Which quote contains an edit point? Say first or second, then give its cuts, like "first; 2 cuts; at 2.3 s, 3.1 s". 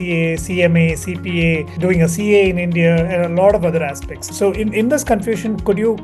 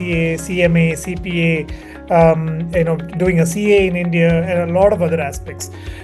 first; 2 cuts; at 1.7 s, 4.3 s